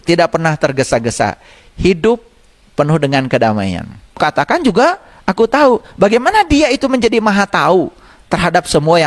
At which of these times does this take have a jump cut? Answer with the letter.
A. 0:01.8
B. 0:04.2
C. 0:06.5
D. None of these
B